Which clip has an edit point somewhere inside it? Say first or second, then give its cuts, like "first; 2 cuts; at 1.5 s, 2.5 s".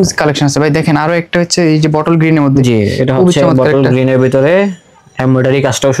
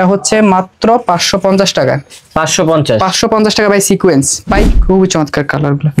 second; 1 cut; at 4.7 s